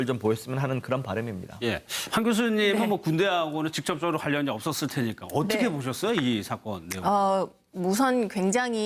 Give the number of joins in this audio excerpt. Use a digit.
0